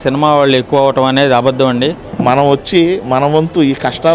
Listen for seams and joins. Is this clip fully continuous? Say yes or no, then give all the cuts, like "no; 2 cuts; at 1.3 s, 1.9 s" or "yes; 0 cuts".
no; 1 cut; at 2.1 s